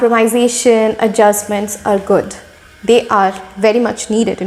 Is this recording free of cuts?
yes; 0 cuts

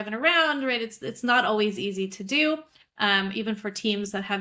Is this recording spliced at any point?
no; 0 cuts

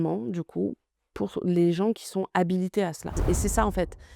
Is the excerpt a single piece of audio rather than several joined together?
no; 1 cut; at 3.2 s

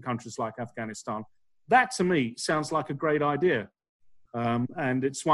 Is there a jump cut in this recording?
no; 0 cuts

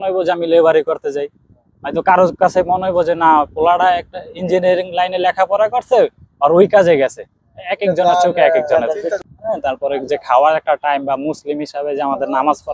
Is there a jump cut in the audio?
yes; 1 cut; at 9.2 s

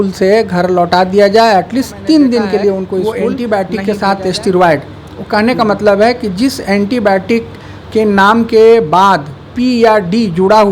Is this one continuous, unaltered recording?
no; 1 cut; at 3.0 s

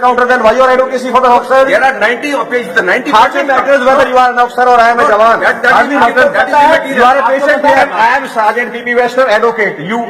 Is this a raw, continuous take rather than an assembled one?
no; 1 cut; at 7.8 s

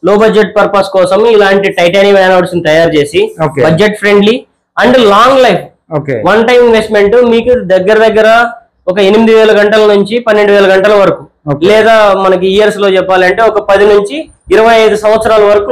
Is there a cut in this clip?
no; 0 cuts

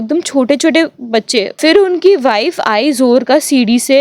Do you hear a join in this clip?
yes; 1 cut; at 1.5 s

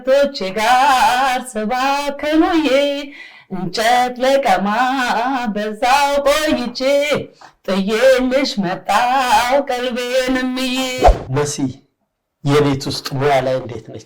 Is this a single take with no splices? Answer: no; 1 cut; at 11.0 s

